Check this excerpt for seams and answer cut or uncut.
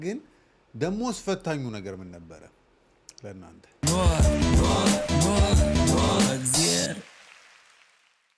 uncut